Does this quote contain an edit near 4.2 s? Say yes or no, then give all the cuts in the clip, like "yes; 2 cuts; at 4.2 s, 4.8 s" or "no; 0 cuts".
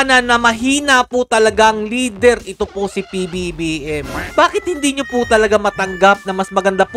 yes; 1 cut; at 4.2 s